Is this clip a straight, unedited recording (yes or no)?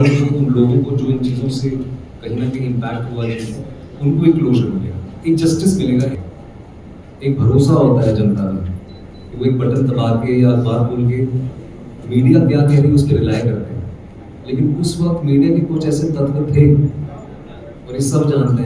no